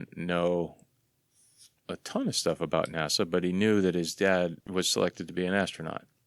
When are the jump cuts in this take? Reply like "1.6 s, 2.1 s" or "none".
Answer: 4.6 s